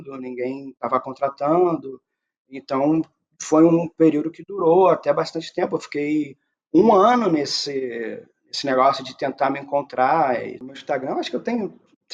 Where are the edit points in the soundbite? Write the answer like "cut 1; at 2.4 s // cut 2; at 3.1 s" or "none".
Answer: cut 1; at 10.7 s